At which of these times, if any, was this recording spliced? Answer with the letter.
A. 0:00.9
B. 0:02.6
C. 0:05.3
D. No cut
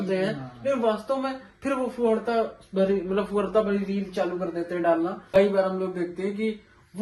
C